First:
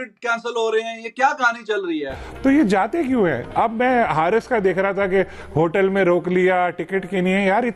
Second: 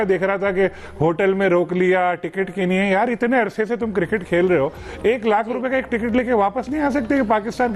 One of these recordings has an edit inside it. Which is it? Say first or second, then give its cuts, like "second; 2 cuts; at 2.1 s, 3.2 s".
first; 1 cut; at 2.1 s